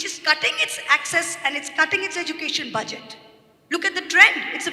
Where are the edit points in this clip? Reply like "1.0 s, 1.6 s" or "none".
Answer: none